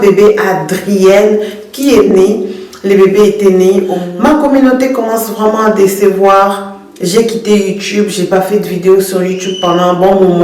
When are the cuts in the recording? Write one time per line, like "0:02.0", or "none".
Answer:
0:04.0